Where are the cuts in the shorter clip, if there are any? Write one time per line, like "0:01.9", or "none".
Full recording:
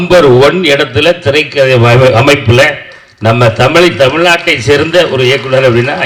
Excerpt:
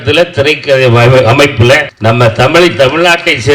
0:01.9

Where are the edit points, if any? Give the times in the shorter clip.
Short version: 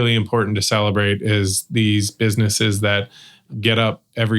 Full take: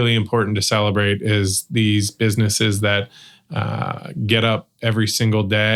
0:03.4

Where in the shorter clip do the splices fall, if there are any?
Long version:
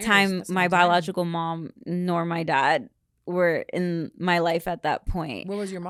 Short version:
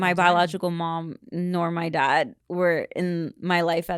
0:02.4

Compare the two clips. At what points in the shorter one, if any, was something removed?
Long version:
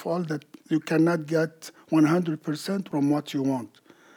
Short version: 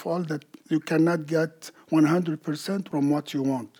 none

